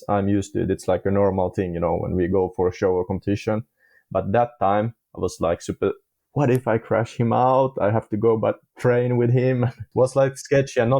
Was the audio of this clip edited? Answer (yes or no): yes